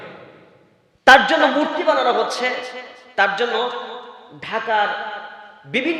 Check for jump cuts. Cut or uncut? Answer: uncut